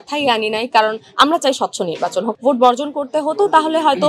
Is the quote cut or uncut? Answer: cut